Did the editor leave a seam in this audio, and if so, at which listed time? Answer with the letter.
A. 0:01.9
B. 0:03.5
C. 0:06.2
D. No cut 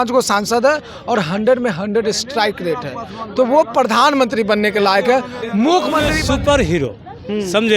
C